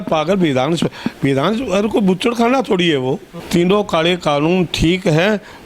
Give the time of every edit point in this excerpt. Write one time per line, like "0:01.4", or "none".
0:03.3